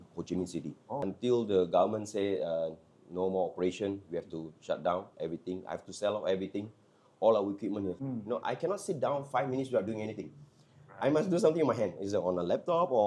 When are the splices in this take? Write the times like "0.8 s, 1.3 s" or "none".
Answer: 1.0 s, 8.0 s